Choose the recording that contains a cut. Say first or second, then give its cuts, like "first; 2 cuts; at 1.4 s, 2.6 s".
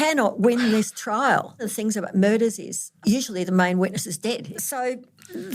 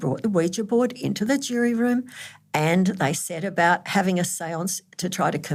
first; 3 cuts; at 1.7 s, 2.9 s, 4.4 s